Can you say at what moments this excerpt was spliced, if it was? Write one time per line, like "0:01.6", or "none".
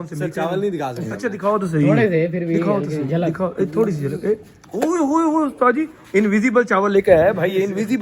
none

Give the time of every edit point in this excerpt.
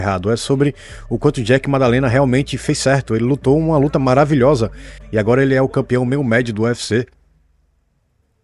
none

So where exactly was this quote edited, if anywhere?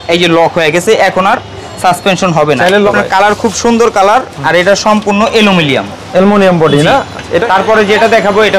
0:02.9
0:07.4

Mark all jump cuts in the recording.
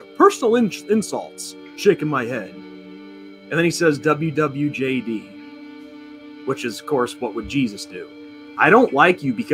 0:08.5

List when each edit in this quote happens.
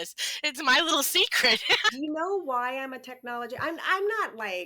0:01.9

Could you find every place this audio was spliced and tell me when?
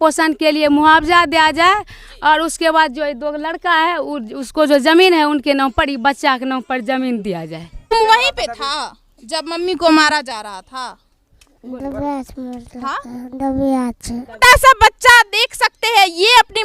0:07.9
0:14.4

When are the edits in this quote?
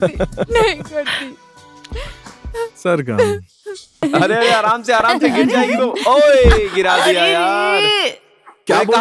0:04.0

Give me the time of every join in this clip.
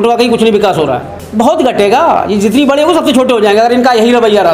0:01.2

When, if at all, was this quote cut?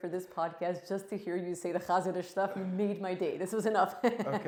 none

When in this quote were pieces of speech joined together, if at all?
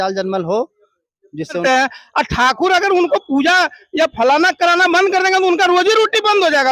0:01.6

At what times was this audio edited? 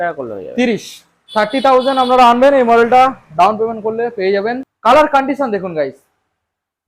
0:04.7

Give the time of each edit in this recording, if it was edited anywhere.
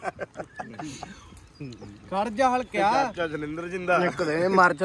none

